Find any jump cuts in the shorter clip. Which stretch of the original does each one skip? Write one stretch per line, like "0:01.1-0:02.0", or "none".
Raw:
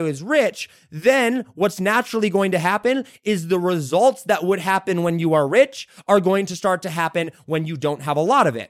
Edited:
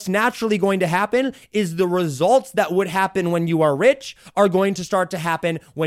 none